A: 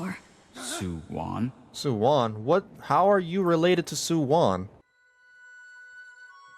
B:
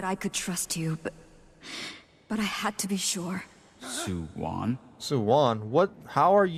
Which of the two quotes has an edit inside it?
A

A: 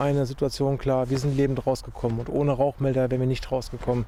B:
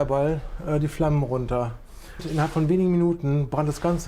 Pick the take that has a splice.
B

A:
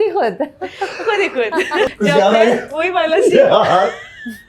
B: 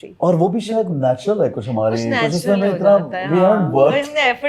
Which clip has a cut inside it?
A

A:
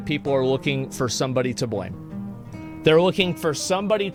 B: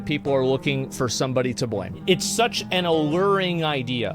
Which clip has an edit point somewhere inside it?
B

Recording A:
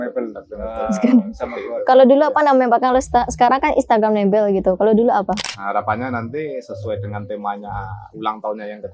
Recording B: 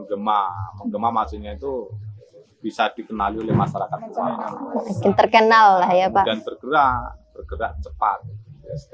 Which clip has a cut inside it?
A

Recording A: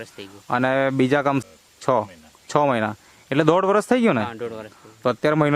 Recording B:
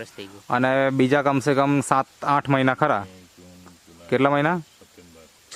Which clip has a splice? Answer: A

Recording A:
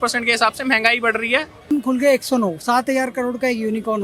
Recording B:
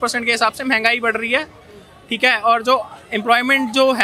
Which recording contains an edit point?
A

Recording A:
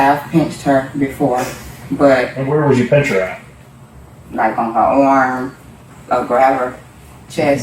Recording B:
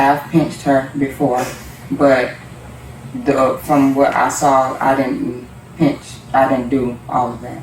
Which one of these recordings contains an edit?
A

